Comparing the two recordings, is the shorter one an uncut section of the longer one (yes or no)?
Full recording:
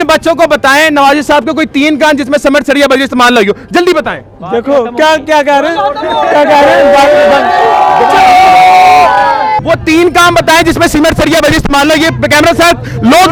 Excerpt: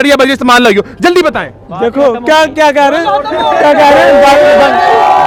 yes